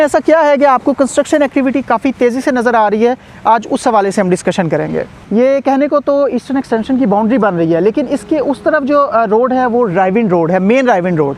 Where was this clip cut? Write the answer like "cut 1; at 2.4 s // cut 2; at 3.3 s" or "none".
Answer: cut 1; at 5.2 s